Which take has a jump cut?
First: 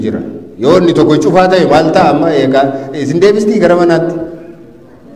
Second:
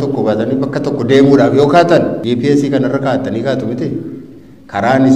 second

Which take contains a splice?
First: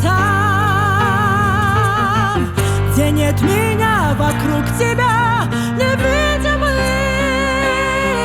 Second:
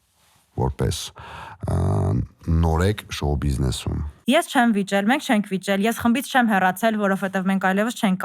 second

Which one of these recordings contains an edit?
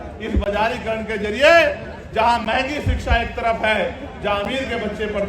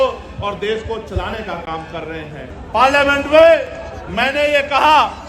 second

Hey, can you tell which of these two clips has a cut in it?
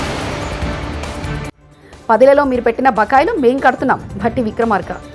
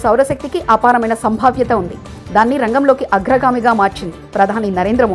first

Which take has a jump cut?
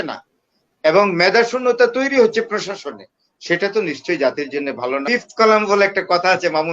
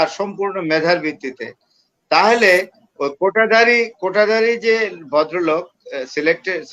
first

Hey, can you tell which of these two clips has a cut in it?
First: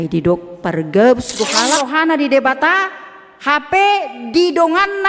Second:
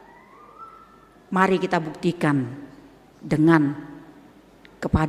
first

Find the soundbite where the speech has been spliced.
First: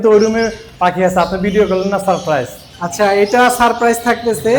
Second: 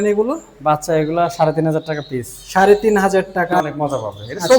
second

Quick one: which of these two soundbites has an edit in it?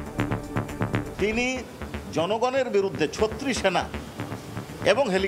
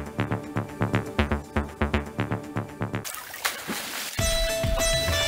first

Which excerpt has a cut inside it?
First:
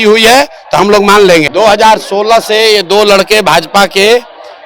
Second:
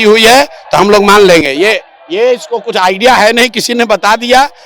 first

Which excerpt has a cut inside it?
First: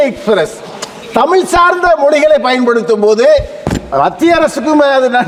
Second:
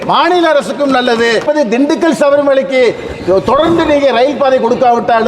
second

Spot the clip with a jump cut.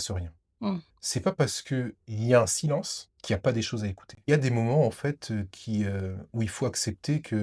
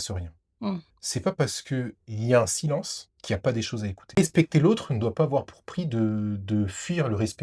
second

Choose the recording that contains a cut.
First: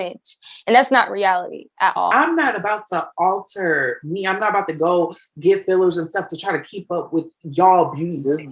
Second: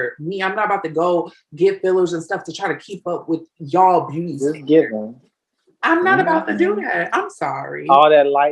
first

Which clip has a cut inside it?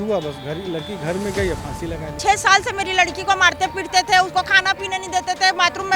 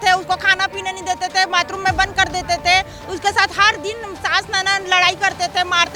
first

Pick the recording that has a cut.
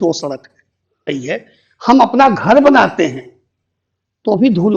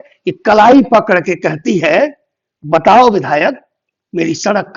first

